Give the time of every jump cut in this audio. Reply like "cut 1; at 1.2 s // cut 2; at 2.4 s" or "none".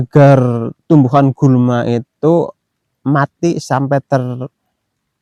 none